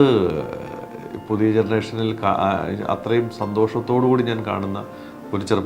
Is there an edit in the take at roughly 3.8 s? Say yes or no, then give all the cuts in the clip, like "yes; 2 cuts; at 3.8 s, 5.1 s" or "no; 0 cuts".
no; 0 cuts